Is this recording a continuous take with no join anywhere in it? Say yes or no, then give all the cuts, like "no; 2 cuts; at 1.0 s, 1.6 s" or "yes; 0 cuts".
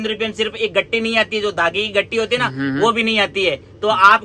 yes; 0 cuts